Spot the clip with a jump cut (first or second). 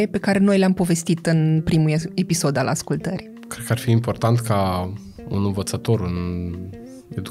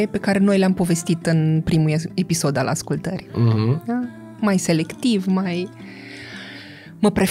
first